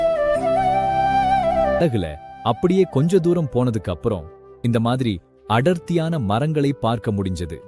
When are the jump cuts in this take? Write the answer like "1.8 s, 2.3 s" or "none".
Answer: 1.8 s

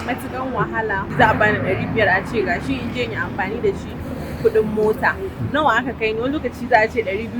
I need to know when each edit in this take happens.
1.1 s

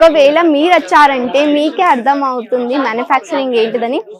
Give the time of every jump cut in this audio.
none

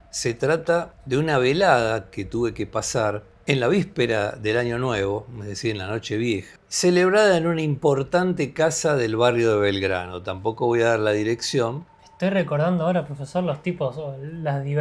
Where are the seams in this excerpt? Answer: 1.0 s, 3.3 s, 6.6 s, 11.9 s

